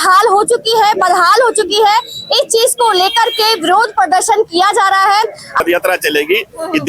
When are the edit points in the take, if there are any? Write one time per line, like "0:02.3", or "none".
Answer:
0:05.6